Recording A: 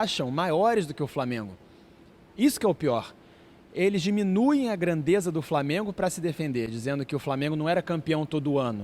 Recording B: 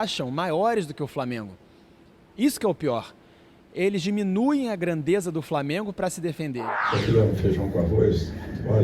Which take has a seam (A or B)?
B